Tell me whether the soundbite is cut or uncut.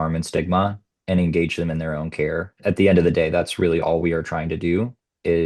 cut